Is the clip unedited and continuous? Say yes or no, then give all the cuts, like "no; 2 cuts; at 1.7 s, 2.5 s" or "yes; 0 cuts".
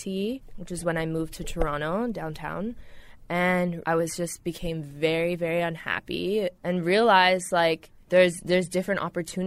no; 1 cut; at 7.9 s